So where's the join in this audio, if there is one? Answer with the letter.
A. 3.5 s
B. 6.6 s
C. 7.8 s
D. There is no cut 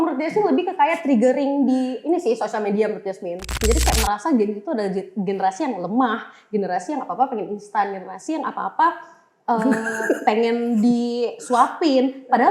A